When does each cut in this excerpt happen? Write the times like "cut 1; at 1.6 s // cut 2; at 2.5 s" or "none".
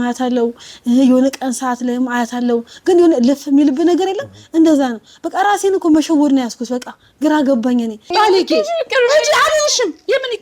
cut 1; at 8.1 s